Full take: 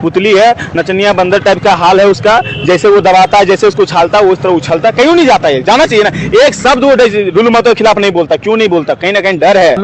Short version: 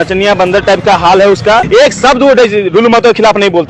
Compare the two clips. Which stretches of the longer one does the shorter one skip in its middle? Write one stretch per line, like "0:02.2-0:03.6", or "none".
0:02.4-0:06.3